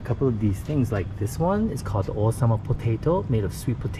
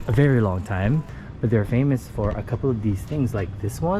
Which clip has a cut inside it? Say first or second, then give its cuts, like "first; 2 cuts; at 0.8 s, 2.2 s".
second; 1 cut; at 1.2 s